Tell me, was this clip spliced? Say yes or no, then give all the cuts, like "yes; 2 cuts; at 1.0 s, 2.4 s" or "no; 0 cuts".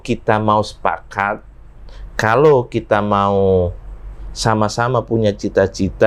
no; 0 cuts